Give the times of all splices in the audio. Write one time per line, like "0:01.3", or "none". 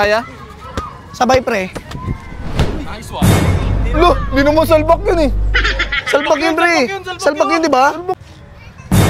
0:08.2